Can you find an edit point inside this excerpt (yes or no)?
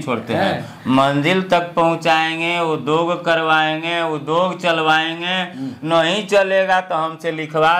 no